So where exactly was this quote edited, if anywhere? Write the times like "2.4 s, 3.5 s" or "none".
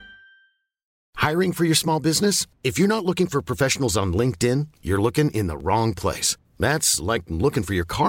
1.0 s